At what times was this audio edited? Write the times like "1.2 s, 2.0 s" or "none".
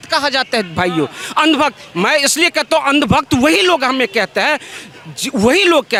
none